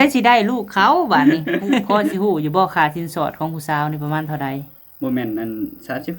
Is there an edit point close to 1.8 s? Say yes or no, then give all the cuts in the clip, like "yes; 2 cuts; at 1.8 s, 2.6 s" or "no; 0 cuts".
yes; 1 cut; at 1.8 s